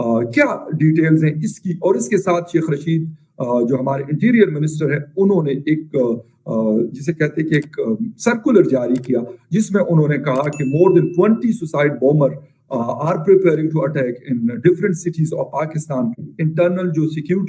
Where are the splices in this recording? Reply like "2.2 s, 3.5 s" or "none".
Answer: 16.3 s